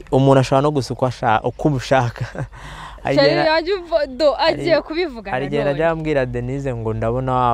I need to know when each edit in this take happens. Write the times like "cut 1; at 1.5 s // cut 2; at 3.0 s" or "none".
none